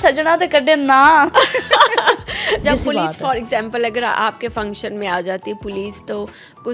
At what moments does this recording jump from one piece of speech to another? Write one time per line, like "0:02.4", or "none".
0:02.6